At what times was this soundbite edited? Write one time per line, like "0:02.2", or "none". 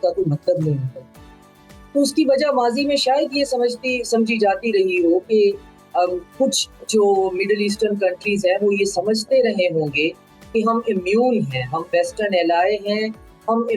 none